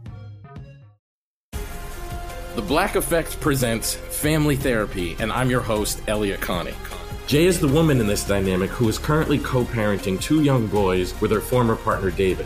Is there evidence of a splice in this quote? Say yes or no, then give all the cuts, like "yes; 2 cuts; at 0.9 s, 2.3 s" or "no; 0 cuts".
yes; 1 cut; at 0.9 s